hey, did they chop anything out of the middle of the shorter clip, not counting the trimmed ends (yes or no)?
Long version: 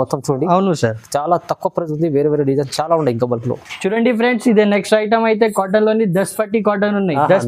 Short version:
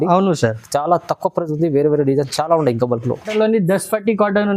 yes